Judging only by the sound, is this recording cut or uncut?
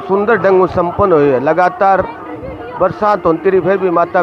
uncut